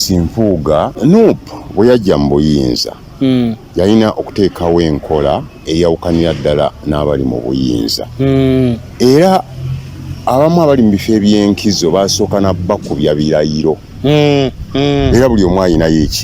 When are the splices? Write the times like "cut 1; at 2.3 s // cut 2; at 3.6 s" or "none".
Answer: cut 1; at 0.9 s